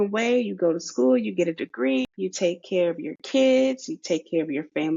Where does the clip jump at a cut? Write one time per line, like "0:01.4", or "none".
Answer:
0:02.1